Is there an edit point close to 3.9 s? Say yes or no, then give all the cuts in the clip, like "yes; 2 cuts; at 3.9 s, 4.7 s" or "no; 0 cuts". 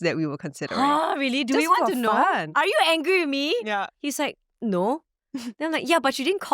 yes; 2 cuts; at 2.5 s, 3.9 s